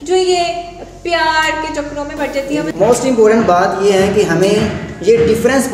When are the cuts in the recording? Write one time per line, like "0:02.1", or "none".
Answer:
0:02.7